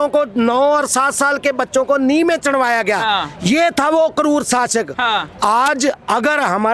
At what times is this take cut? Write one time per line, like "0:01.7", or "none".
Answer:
none

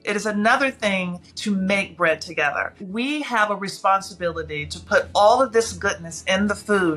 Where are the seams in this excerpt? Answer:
0:02.8

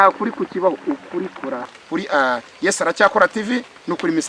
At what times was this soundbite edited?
0:01.7

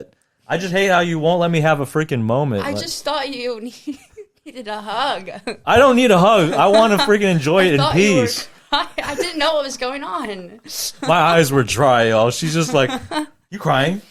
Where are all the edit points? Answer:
none

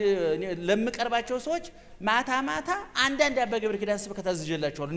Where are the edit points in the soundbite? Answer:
none

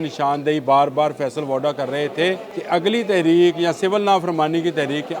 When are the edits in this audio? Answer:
0:02.5

